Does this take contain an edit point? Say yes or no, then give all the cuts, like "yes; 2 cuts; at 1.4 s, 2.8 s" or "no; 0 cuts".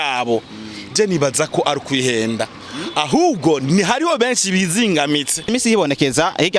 yes; 1 cut; at 5.5 s